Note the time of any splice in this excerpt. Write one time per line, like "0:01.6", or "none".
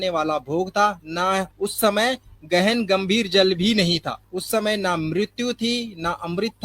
0:01.5
0:04.2